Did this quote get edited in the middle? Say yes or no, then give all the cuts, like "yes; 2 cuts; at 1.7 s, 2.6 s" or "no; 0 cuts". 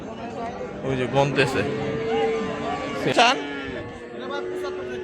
yes; 1 cut; at 3.1 s